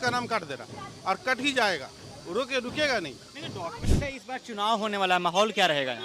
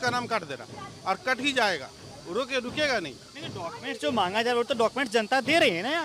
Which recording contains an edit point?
first; 1 cut; at 3.8 s

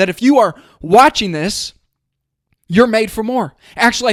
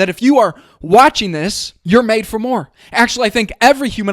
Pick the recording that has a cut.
second; 1 cut; at 1.7 s

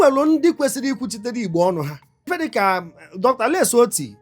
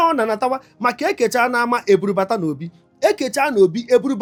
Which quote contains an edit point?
first; 1 cut; at 2.3 s

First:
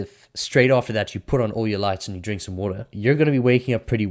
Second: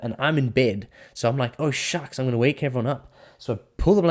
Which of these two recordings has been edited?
first; 1 cut; at 2.9 s

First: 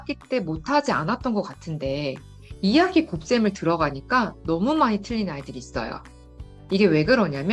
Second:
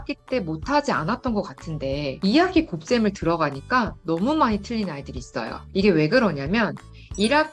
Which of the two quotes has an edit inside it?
second; 2 cuts; at 2.1 s, 5.6 s

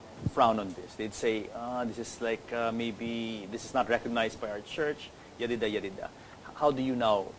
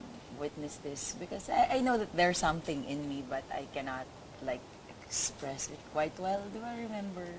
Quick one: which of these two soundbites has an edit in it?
first; 1 cut; at 5.6 s

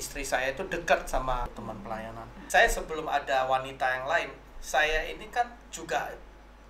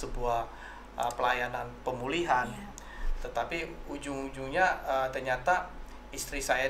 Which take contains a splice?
first; 1 cut; at 1.8 s

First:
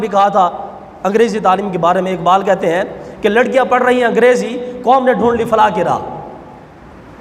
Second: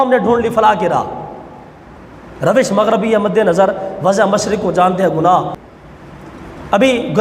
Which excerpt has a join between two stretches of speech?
second; 1 cut; at 5.6 s

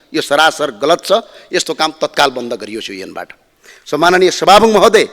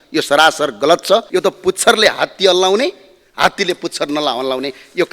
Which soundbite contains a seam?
second; 1 cut; at 1.3 s

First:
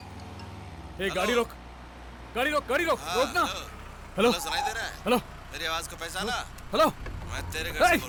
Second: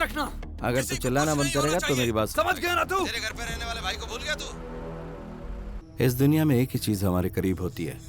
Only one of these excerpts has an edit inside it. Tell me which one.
second; 1 cut; at 5.8 s

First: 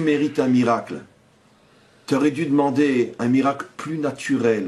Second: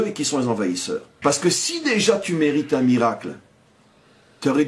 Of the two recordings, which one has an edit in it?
second; 1 cut; at 1.1 s

